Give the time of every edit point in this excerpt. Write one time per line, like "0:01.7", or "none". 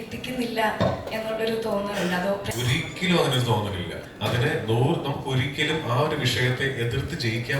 0:02.5
0:04.0